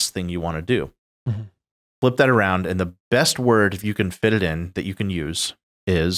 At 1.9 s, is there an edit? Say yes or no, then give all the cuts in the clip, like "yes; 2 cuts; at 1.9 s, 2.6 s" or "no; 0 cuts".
yes; 1 cut; at 1.9 s